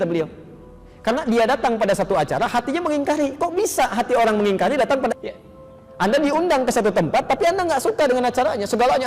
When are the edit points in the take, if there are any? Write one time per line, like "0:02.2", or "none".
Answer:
0:05.1